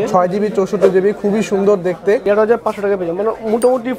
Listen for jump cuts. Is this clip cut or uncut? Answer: cut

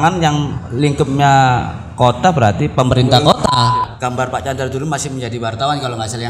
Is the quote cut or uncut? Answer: cut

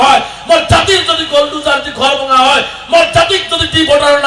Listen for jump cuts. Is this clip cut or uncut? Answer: uncut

